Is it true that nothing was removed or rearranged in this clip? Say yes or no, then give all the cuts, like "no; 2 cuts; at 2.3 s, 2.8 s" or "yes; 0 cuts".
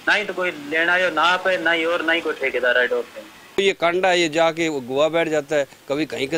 no; 1 cut; at 3.6 s